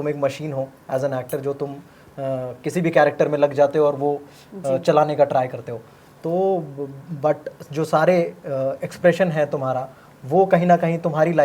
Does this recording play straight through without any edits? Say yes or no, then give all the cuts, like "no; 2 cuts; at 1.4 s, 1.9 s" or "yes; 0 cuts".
yes; 0 cuts